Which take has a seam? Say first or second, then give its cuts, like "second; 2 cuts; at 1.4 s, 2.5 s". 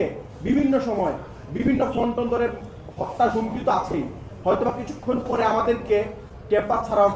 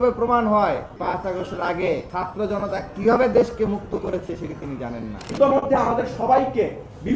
second; 3 cuts; at 0.9 s, 2.1 s, 5.2 s